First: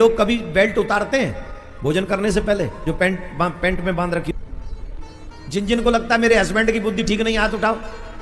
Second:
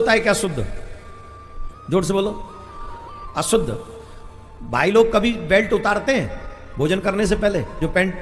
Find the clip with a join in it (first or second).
first